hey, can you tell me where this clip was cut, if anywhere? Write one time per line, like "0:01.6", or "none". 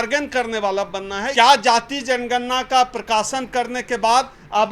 0:01.2

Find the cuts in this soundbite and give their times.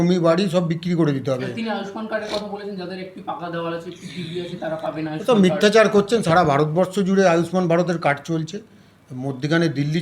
none

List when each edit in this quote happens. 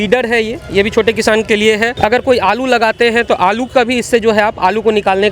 0:01.9

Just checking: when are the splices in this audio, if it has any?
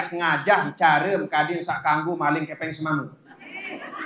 none

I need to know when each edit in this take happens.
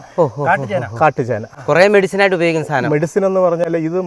none

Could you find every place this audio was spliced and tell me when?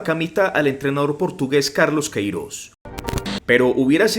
0:02.9

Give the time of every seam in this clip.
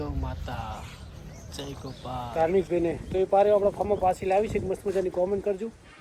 0:02.3

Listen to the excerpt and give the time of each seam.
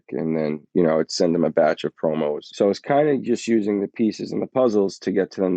0:02.4

